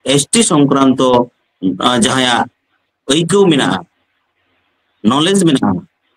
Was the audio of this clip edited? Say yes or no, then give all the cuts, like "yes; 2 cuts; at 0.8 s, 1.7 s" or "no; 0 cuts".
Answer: no; 0 cuts